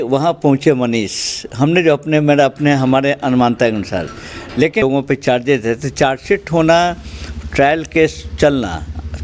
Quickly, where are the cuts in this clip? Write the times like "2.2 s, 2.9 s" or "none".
4.8 s